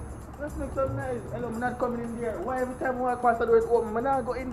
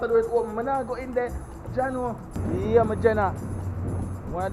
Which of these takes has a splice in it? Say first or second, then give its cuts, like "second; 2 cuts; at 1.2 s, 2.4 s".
second; 1 cut; at 2.3 s